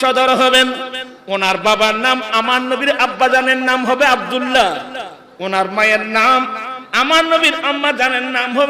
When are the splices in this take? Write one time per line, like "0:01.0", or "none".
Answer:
none